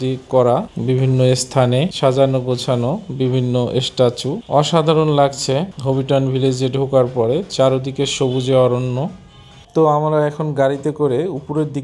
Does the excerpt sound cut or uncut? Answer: uncut